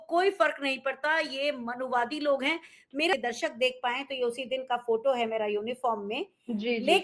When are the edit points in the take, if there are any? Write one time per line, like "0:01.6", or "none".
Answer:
0:03.1